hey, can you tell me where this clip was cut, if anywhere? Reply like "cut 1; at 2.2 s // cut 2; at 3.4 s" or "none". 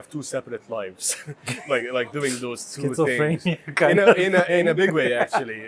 none